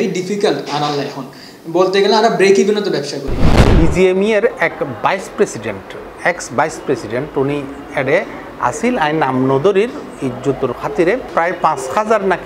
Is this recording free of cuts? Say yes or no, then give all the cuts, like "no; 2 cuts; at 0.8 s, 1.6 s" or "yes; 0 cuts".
no; 1 cut; at 3.6 s